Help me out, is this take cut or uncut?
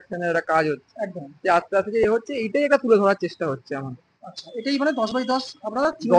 uncut